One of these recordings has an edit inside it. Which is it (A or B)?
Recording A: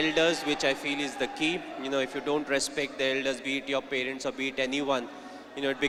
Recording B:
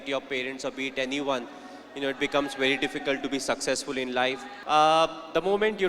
B